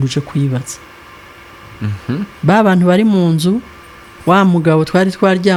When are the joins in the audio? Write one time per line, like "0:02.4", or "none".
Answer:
none